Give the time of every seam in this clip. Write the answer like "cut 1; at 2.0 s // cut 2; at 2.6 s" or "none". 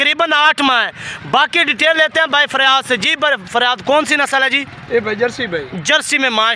none